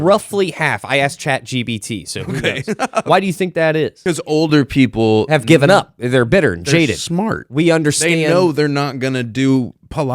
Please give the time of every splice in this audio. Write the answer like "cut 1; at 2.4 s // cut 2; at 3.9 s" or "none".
cut 1; at 3.0 s // cut 2; at 4.2 s